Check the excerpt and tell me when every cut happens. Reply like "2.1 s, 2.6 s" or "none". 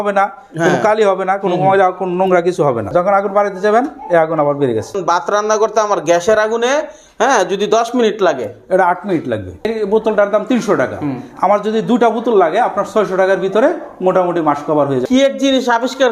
2.9 s, 5.0 s, 9.7 s, 15.0 s